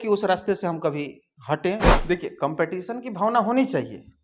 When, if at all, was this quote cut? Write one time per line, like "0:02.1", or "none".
0:01.9